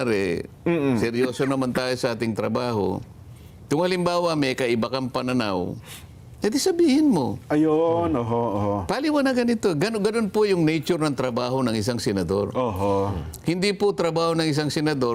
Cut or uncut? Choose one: uncut